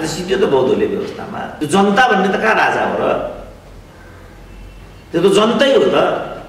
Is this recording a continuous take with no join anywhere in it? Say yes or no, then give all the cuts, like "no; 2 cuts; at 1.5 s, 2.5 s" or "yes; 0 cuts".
yes; 0 cuts